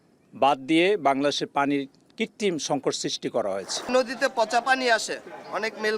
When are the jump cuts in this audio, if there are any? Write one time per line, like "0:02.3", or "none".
0:03.9